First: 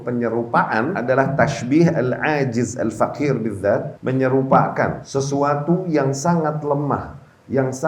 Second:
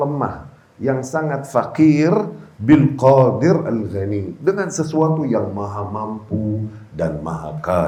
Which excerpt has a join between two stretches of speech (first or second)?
first